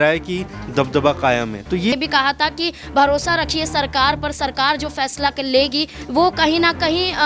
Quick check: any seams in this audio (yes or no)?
yes